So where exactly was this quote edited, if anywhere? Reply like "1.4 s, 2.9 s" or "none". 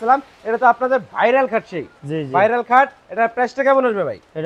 none